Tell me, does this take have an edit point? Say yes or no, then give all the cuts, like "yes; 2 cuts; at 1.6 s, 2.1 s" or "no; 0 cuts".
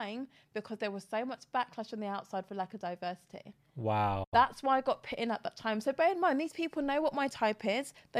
no; 0 cuts